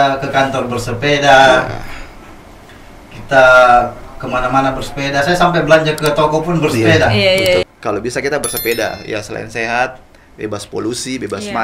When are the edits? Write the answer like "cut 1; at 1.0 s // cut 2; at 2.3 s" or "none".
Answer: cut 1; at 7.6 s